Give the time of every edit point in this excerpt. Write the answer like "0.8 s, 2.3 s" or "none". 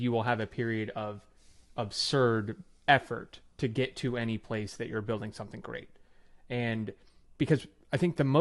none